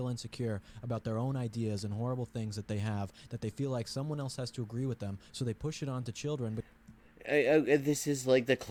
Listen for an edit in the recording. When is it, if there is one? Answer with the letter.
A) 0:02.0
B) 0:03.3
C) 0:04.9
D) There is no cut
D